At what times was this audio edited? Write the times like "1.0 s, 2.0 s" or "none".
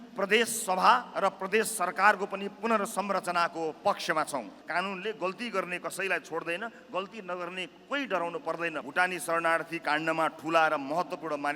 4.5 s, 8.8 s

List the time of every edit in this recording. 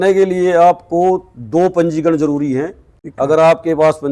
2.9 s

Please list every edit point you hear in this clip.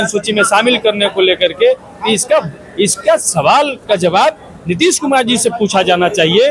none

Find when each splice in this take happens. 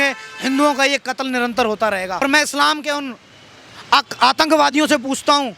2.2 s

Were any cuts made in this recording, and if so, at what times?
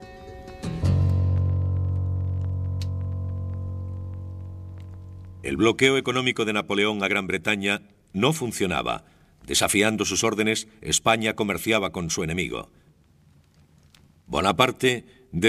none

